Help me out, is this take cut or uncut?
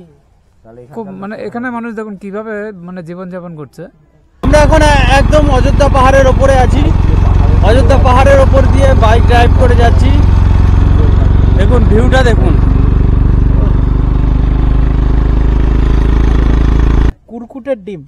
cut